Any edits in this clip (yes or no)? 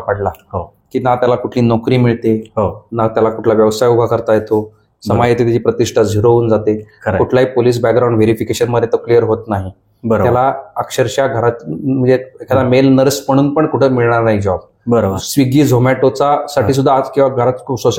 no